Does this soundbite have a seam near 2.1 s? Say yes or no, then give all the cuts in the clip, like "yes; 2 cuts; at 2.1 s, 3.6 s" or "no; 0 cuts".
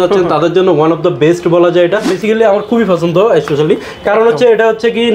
yes; 1 cut; at 2.1 s